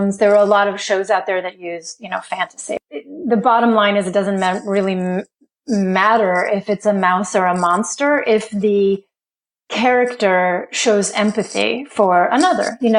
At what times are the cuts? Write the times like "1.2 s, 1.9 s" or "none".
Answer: 2.8 s